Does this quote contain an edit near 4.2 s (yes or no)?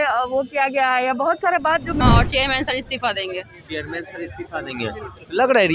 no